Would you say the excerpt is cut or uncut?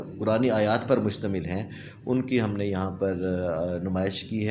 cut